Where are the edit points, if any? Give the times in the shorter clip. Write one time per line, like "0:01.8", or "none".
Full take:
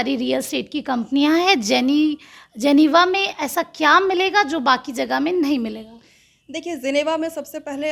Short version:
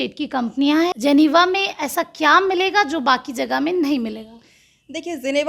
0:00.9